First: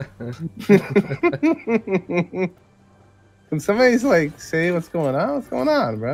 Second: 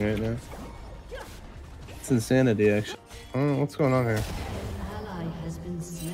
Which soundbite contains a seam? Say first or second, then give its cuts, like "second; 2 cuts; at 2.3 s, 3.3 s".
second; 1 cut; at 2.9 s